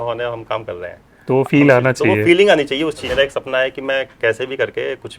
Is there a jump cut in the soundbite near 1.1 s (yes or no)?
no